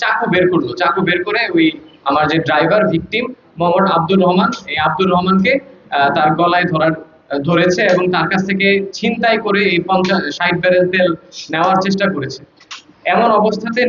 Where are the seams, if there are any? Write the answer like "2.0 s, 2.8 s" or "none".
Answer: none

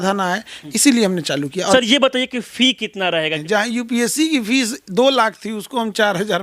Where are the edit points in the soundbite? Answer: 1.7 s, 3.4 s

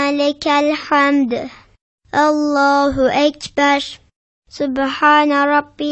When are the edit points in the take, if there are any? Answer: 1.8 s, 4.4 s

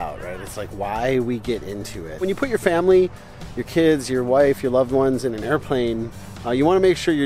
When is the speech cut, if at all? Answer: 2.2 s

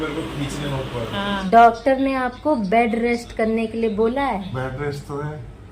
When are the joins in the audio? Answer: 1.4 s, 4.5 s

